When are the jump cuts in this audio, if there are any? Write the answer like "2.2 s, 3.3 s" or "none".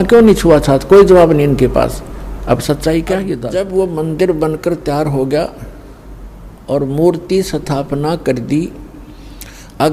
3.4 s